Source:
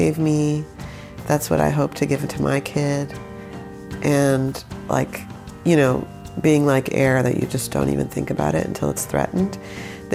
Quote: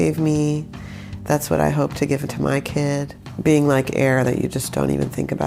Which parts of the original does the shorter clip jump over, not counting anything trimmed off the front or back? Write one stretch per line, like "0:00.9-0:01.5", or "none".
0:03.2-0:06.2